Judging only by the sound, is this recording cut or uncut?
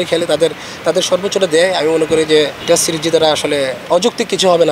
cut